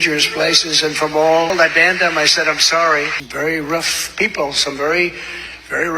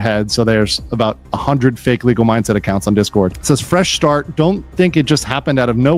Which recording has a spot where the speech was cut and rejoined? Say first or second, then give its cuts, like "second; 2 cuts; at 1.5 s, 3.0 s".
first; 2 cuts; at 1.5 s, 3.2 s